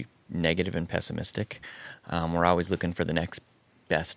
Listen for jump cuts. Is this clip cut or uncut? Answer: uncut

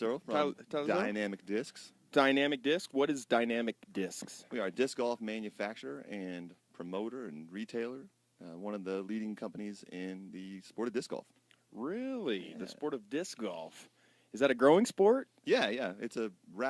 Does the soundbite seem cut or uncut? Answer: uncut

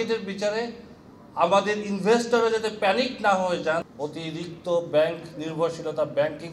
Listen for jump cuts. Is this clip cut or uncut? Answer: cut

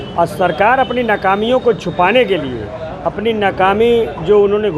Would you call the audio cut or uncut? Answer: uncut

